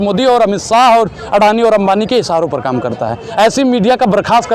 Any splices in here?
no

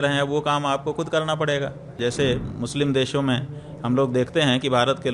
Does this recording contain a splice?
yes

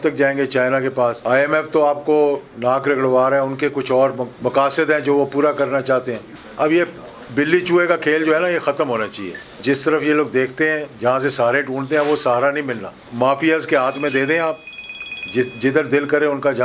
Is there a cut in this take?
yes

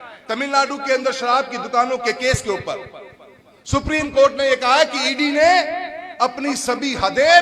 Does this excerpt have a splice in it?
no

